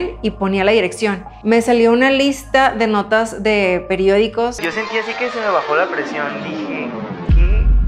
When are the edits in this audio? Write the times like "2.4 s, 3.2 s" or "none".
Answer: 1.3 s, 4.6 s